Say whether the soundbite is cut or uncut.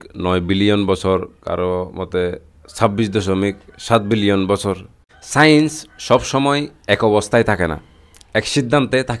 uncut